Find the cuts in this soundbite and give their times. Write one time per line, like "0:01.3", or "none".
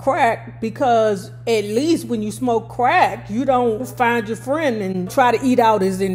0:03.9
0:05.1